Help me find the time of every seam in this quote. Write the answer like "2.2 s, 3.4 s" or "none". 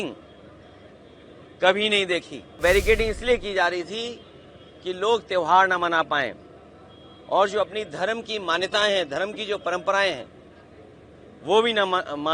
2.6 s